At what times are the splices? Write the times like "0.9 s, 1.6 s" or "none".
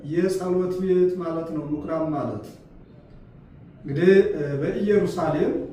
none